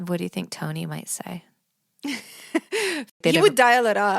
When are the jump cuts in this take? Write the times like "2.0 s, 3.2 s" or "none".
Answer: 3.1 s